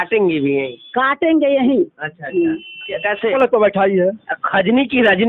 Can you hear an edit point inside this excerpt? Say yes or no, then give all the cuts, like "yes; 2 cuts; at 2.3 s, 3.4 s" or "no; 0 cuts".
yes; 1 cut; at 3.3 s